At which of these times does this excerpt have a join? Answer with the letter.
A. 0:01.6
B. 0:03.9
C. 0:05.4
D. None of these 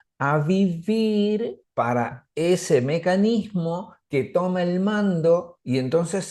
A